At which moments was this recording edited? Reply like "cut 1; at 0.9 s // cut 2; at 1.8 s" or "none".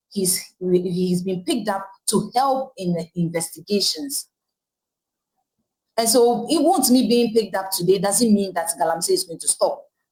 none